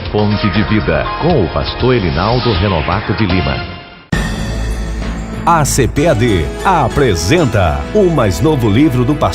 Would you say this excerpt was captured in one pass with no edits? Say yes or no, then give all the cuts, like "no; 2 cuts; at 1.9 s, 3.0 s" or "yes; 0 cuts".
no; 1 cut; at 3.9 s